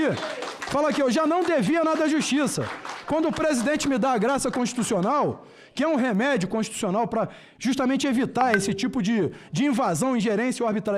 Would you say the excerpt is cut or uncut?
uncut